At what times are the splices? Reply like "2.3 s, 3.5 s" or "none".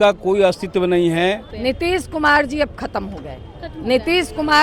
1.5 s